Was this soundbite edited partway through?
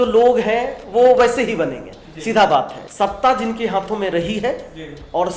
yes; 1 cut; at 2.8 s

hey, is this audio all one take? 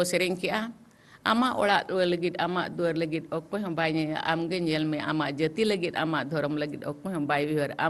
yes; 0 cuts

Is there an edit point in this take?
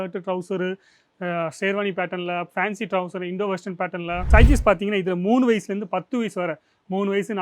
yes; 1 cut; at 4.2 s

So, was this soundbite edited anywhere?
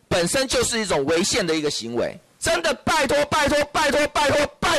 yes; 1 cut; at 2.3 s

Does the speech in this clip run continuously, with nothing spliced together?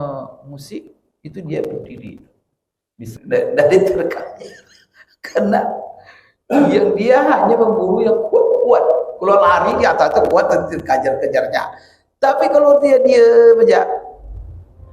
no; 1 cut; at 3.0 s

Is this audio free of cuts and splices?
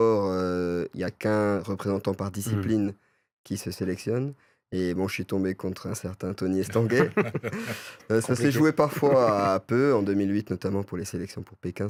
yes; 0 cuts

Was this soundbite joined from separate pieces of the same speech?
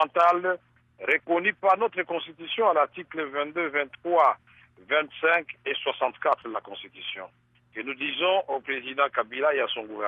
yes; 1 cut; at 3.2 s

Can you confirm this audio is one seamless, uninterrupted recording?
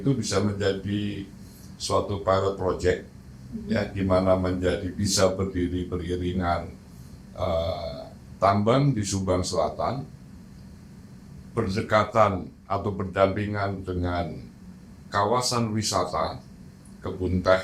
yes; 0 cuts

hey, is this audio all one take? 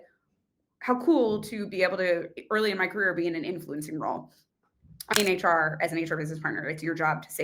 no; 1 cut; at 5.1 s

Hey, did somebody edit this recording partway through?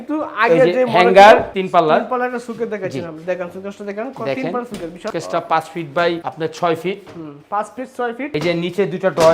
yes; 2 cuts; at 1.5 s, 8.3 s

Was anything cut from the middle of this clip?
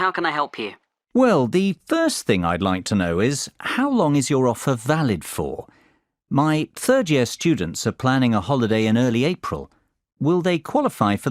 yes; 1 cut; at 8.4 s

